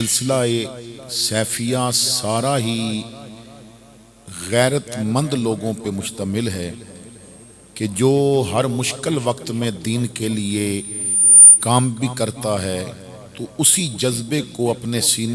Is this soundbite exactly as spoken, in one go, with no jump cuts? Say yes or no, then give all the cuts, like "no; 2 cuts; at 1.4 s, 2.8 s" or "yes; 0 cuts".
yes; 0 cuts